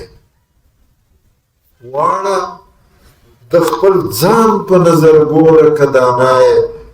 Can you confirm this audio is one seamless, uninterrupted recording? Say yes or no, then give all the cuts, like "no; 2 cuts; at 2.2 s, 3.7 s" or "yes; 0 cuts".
yes; 0 cuts